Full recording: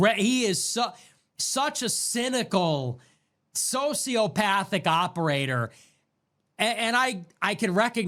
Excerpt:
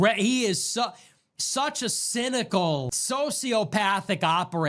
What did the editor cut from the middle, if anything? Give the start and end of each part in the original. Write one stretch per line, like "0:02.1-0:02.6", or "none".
0:03.0-0:03.6